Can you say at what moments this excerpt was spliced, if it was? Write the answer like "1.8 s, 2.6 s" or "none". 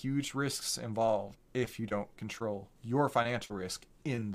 1.4 s, 2.7 s